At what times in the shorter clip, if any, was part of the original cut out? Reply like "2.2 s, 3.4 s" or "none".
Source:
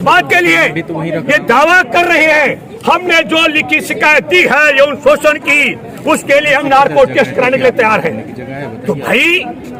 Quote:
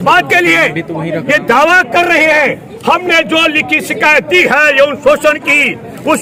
none